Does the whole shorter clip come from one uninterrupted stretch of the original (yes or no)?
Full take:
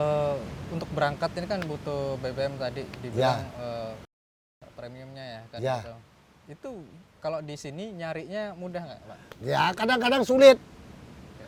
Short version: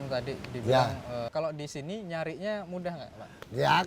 no